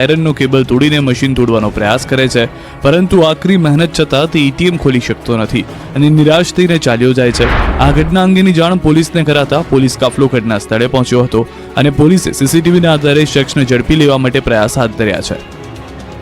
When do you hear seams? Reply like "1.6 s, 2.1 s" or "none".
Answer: 14.5 s